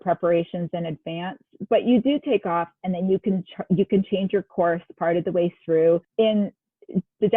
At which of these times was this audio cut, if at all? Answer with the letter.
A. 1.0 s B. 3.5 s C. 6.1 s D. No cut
C